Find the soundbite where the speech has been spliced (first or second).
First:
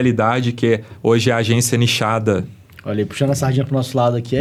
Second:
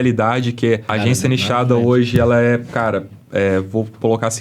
second